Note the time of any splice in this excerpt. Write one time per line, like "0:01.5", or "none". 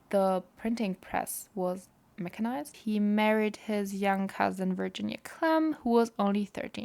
0:02.8